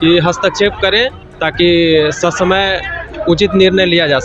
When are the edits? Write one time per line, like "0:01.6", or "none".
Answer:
0:01.2